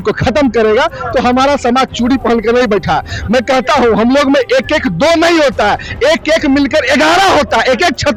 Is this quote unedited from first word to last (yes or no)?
yes